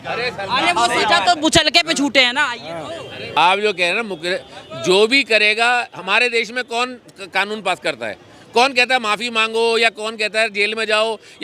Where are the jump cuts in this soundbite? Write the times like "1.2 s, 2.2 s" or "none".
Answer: none